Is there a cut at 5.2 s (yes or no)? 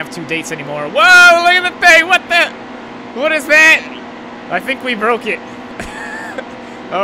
no